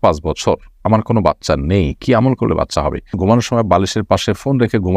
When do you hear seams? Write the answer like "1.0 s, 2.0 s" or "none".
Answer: 3.1 s